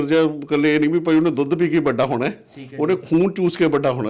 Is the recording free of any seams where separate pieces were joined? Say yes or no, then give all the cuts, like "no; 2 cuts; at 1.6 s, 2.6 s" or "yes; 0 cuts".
yes; 0 cuts